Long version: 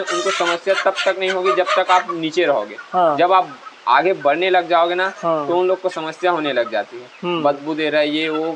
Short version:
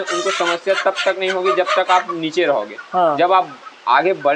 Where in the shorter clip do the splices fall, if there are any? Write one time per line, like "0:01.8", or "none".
none